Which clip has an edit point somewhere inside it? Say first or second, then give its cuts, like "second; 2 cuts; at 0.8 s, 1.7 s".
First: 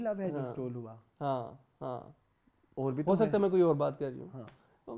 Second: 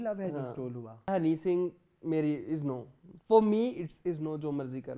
second; 1 cut; at 1.1 s